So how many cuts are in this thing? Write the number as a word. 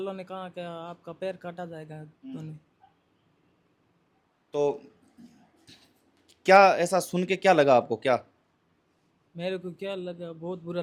zero